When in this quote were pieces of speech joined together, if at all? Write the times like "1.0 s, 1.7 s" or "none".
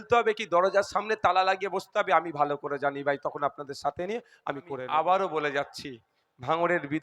4.8 s